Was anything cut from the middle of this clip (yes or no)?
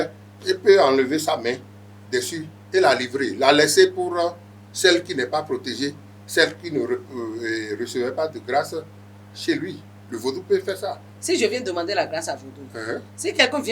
yes